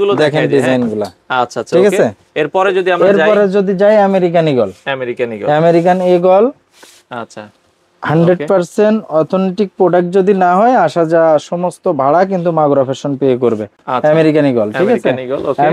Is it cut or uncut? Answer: uncut